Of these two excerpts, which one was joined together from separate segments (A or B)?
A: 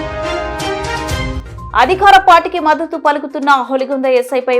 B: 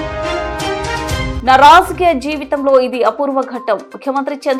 A